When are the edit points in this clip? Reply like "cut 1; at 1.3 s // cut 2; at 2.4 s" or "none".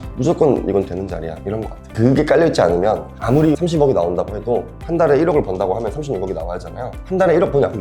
none